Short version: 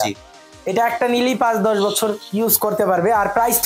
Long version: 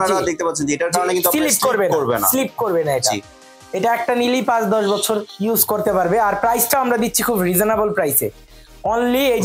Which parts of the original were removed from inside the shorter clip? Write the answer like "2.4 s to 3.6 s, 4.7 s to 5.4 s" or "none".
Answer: none